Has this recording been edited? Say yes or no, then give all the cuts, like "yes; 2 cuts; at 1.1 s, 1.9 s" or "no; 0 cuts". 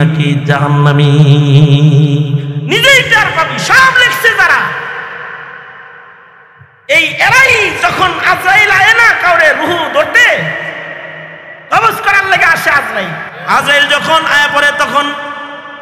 yes; 1 cut; at 13.4 s